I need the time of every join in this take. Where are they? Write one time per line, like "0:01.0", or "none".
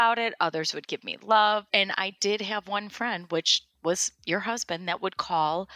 0:01.7